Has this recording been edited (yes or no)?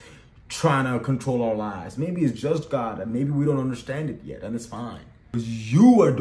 yes